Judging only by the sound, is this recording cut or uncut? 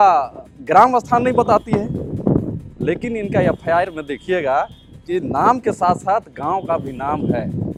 uncut